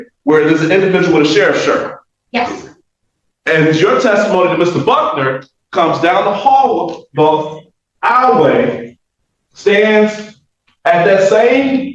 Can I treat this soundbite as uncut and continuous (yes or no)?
yes